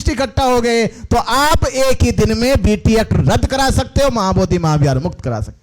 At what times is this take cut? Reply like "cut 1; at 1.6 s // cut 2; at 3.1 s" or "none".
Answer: none